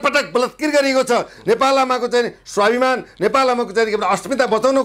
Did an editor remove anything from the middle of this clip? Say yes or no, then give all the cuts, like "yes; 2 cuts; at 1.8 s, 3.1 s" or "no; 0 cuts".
no; 0 cuts